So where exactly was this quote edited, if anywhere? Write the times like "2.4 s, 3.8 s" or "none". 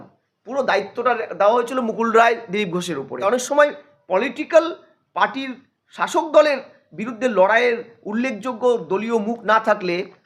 3.2 s